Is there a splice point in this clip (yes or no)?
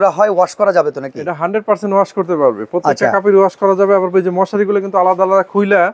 no